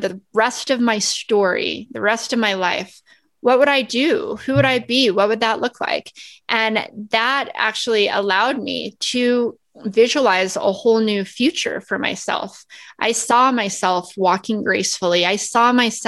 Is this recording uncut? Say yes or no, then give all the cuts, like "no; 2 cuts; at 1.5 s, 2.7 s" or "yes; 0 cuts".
yes; 0 cuts